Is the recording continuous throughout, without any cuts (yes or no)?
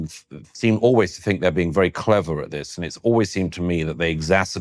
yes